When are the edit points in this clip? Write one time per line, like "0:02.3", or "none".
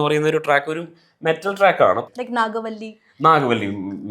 0:02.0